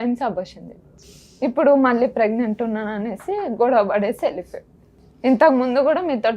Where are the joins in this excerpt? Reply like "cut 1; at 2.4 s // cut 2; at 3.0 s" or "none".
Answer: none